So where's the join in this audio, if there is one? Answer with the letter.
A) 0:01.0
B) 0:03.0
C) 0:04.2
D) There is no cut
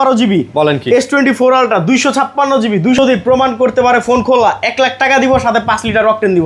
B